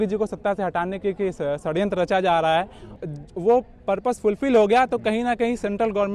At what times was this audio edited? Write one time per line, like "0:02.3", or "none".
0:02.8